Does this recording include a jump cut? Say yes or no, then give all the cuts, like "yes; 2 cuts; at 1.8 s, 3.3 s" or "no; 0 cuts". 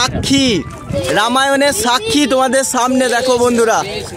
no; 0 cuts